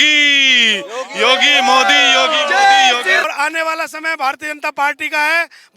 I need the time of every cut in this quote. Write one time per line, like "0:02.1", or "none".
0:03.2